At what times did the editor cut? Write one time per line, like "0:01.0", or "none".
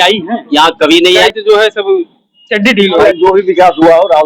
0:01.2
0:03.0